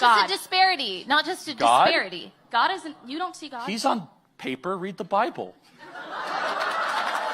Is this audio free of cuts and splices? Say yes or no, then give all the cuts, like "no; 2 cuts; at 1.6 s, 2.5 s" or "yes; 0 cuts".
no; 1 cut; at 0.9 s